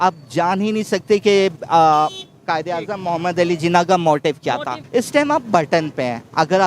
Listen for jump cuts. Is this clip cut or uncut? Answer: cut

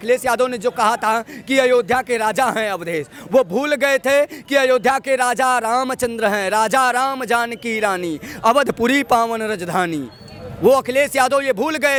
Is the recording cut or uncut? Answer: uncut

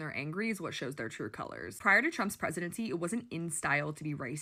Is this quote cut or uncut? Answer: uncut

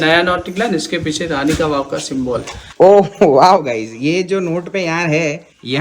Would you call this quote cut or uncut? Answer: cut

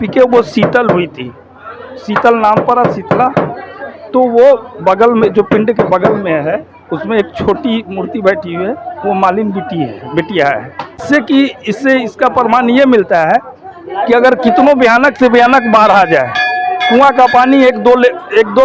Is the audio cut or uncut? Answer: cut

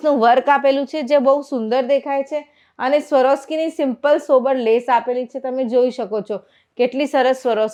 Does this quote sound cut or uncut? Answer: uncut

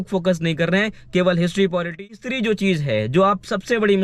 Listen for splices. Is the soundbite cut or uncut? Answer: cut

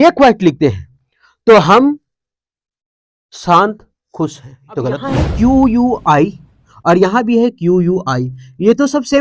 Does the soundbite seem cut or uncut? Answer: cut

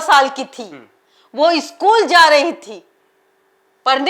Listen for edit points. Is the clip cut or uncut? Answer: uncut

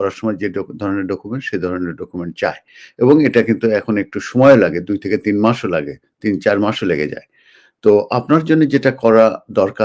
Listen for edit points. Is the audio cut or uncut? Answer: uncut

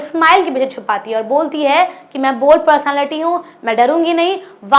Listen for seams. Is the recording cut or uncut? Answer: uncut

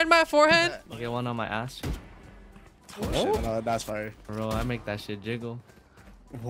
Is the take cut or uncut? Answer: uncut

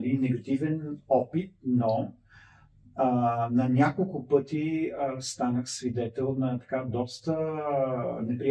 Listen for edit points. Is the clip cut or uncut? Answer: uncut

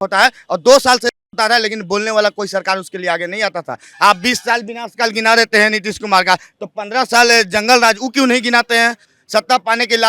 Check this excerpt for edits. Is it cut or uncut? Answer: cut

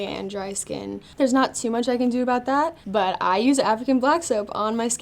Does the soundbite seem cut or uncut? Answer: cut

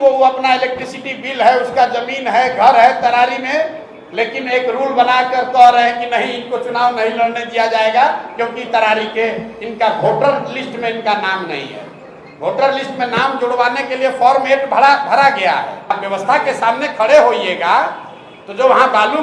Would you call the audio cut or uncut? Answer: cut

